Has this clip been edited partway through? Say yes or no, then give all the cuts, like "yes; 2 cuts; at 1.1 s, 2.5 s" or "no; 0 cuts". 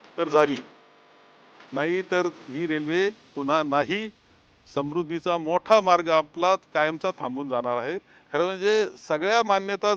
yes; 1 cut; at 8.1 s